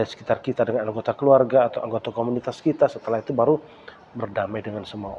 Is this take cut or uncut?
uncut